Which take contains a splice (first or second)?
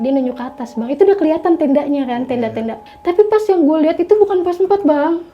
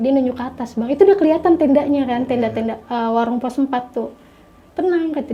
first